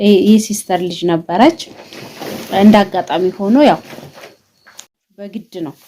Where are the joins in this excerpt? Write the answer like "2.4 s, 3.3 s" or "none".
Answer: 4.9 s